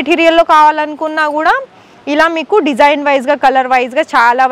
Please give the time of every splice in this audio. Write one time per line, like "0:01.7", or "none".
none